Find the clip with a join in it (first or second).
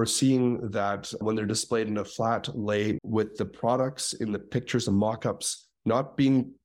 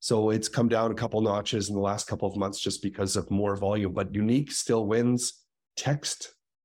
first